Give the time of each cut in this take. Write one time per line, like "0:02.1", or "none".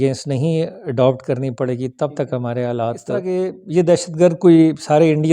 0:03.2

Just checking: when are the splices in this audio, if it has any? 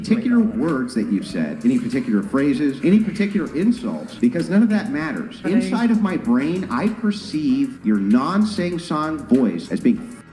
none

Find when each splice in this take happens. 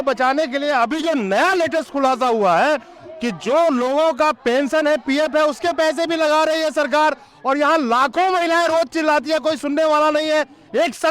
none

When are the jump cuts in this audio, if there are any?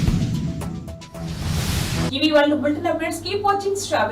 none

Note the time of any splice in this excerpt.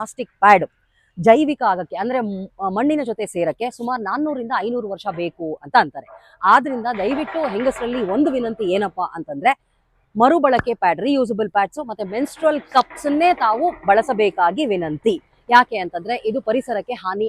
none

